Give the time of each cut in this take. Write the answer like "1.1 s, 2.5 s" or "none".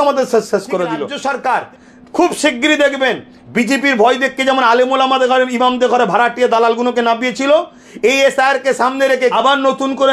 1.1 s, 9.3 s